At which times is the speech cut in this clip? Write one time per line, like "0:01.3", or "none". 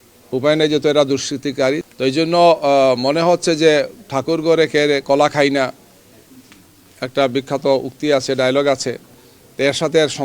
0:01.8